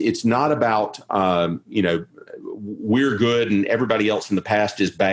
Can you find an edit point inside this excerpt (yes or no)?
no